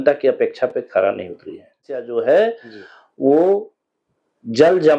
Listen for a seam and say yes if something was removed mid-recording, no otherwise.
yes